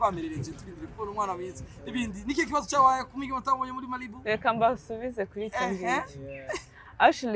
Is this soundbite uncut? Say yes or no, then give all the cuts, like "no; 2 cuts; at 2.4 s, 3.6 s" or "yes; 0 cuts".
yes; 0 cuts